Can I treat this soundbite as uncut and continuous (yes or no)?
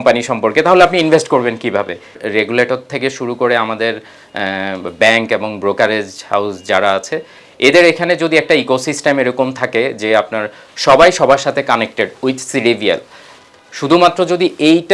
no